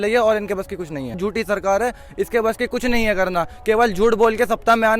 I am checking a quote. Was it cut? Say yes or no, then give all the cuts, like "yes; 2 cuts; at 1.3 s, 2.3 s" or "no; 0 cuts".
yes; 1 cut; at 1.2 s